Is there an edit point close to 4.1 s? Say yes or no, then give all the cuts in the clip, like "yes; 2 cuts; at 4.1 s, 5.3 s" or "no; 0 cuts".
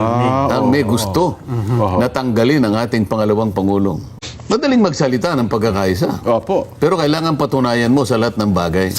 yes; 1 cut; at 4.1 s